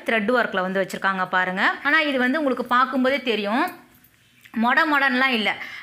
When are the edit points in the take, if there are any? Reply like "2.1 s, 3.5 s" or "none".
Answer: 1.8 s